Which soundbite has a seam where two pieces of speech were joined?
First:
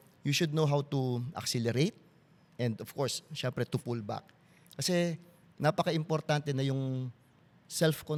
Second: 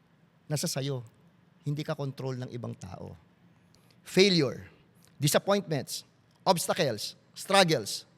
second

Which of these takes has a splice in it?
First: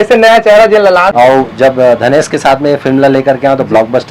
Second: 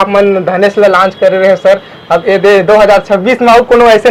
first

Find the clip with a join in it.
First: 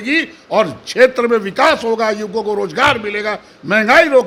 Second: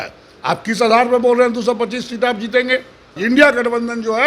second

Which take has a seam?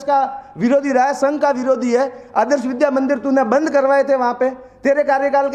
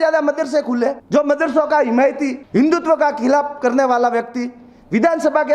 second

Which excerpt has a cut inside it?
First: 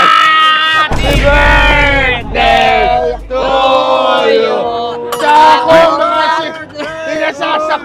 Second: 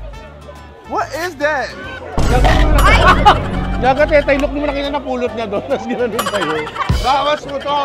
second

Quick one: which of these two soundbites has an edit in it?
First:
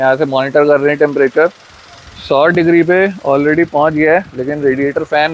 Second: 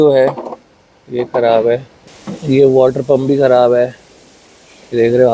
second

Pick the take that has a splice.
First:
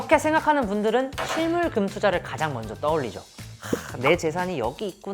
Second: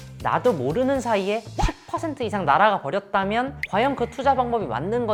first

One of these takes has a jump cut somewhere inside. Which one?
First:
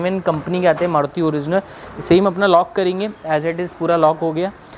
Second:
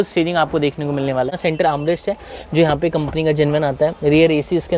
second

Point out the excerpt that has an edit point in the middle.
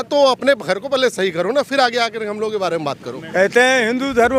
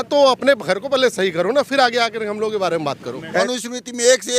second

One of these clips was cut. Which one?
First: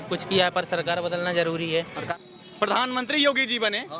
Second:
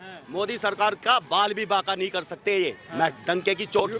first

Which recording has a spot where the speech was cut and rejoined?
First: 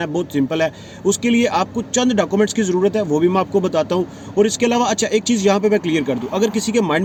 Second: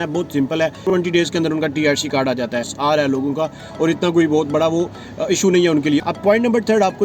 second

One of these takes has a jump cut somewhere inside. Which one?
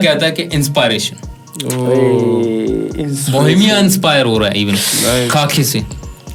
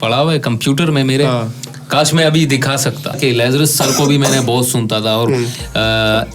second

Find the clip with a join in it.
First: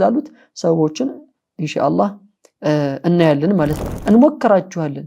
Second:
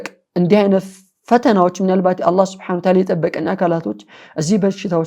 first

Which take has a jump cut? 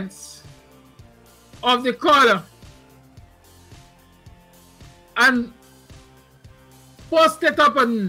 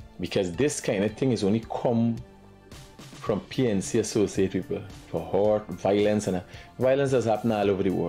first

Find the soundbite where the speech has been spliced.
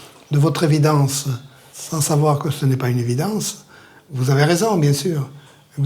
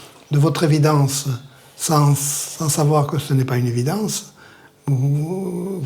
first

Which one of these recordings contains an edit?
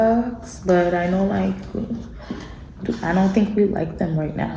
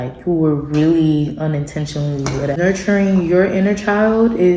second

